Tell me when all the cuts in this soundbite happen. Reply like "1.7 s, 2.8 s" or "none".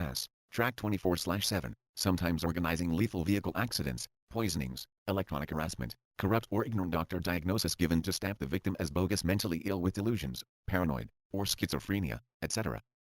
0.9 s, 6.0 s